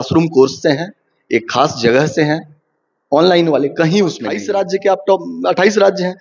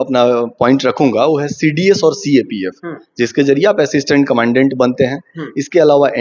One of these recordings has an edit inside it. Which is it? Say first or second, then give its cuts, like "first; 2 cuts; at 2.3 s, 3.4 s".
first; 1 cut; at 4.3 s